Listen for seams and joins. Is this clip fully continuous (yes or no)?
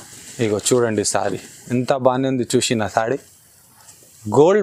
yes